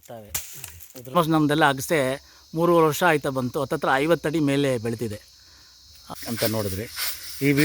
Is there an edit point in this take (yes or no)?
yes